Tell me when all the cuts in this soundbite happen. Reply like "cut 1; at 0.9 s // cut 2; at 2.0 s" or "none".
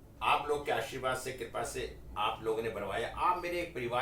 cut 1; at 2.0 s